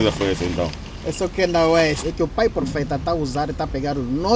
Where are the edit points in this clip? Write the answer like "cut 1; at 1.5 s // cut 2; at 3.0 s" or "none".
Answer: cut 1; at 2.0 s